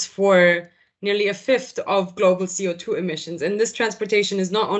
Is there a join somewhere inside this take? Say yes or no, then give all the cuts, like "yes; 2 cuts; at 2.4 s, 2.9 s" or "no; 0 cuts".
no; 0 cuts